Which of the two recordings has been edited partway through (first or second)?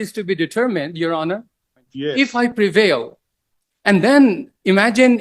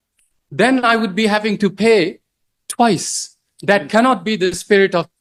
first